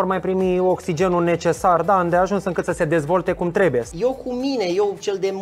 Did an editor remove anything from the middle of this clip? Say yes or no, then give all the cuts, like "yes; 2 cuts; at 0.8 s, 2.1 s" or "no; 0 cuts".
yes; 1 cut; at 3.9 s